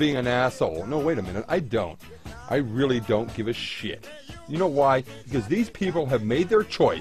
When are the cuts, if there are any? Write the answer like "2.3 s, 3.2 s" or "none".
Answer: 5.5 s